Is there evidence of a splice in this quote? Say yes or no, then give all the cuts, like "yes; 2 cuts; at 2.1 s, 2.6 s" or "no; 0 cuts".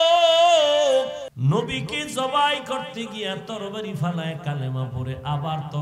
yes; 1 cut; at 1.3 s